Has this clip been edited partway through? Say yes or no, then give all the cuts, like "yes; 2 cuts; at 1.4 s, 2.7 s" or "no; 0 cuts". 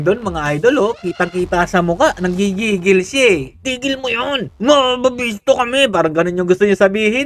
no; 0 cuts